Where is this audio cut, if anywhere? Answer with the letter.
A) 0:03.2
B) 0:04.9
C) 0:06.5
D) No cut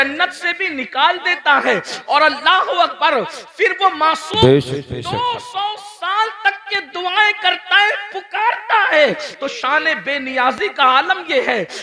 D